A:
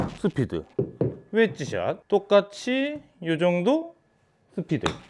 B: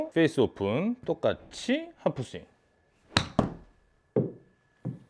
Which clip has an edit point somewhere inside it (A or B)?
A